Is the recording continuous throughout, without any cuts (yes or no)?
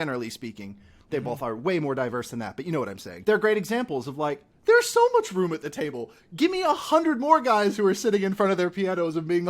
no